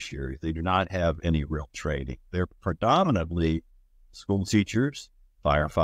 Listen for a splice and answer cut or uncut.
uncut